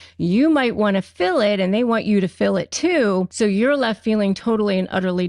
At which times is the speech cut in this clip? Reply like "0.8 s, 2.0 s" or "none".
3.3 s